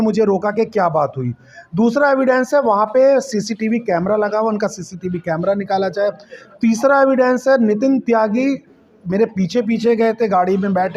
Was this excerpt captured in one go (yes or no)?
yes